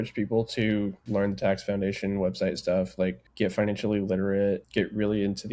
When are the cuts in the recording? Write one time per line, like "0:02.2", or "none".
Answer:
0:01.0
0:03.2
0:04.6